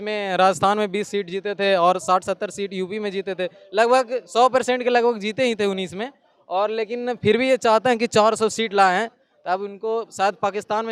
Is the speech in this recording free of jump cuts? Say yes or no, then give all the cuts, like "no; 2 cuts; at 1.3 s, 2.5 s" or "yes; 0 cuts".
yes; 0 cuts